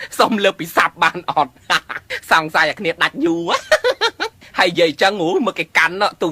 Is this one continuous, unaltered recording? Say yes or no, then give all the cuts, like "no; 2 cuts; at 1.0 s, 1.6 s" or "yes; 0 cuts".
no; 1 cut; at 3.1 s